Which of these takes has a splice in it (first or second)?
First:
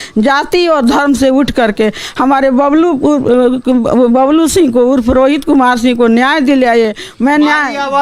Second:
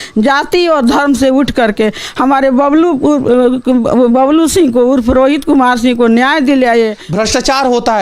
second